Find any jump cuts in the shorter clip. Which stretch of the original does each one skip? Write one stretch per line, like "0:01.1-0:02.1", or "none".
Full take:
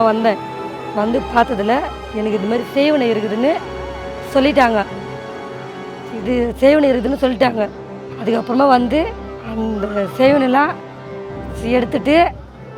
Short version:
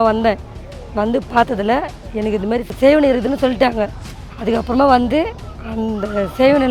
0:02.7-0:06.5